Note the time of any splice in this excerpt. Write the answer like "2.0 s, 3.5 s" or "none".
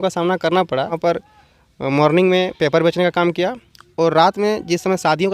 0.9 s

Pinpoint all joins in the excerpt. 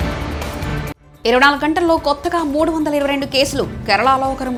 none

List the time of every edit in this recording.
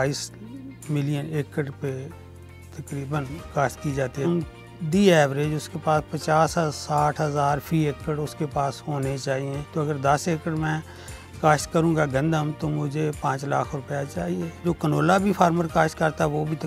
4.3 s, 9.6 s, 14.9 s

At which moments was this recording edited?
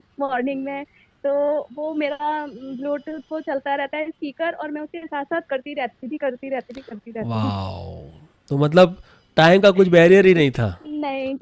none

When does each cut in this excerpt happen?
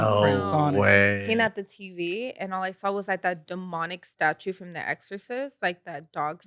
1.2 s

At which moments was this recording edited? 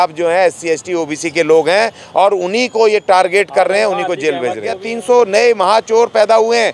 4.9 s

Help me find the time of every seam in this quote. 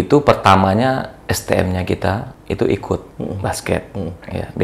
2.3 s, 3.1 s

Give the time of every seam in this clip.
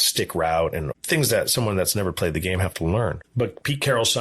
0.9 s, 3.2 s

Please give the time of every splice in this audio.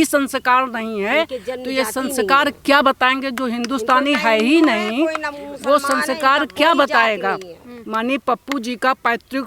none

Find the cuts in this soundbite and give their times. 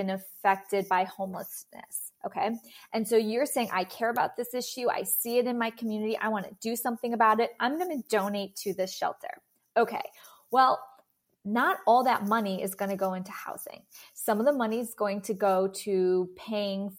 none

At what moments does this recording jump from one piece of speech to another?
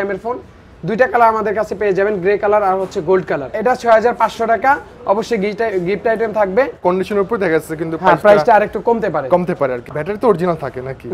none

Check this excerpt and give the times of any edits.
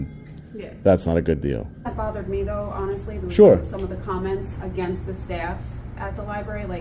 1.9 s

